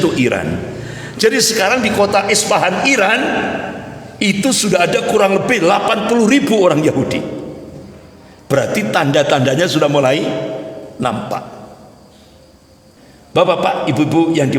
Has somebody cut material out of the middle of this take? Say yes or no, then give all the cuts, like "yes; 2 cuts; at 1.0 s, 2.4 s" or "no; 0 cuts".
yes; 1 cut; at 13.0 s